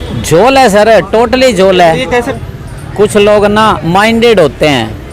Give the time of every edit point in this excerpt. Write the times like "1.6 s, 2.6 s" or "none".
2.3 s